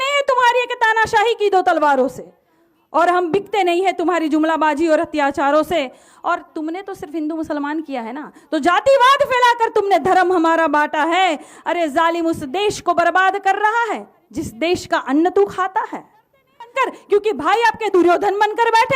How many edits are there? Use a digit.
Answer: 1